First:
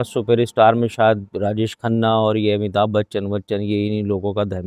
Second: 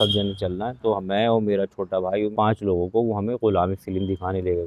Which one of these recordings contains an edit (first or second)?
second